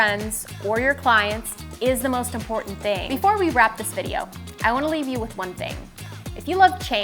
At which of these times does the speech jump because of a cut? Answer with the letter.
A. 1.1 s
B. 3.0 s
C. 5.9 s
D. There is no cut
B